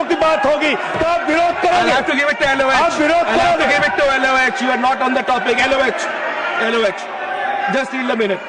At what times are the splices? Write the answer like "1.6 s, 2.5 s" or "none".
none